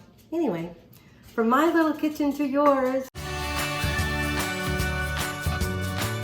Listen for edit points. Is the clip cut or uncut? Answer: cut